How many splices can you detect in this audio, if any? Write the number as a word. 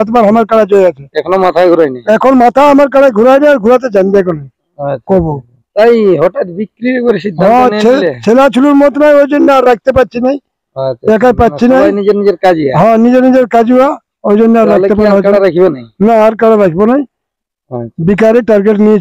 zero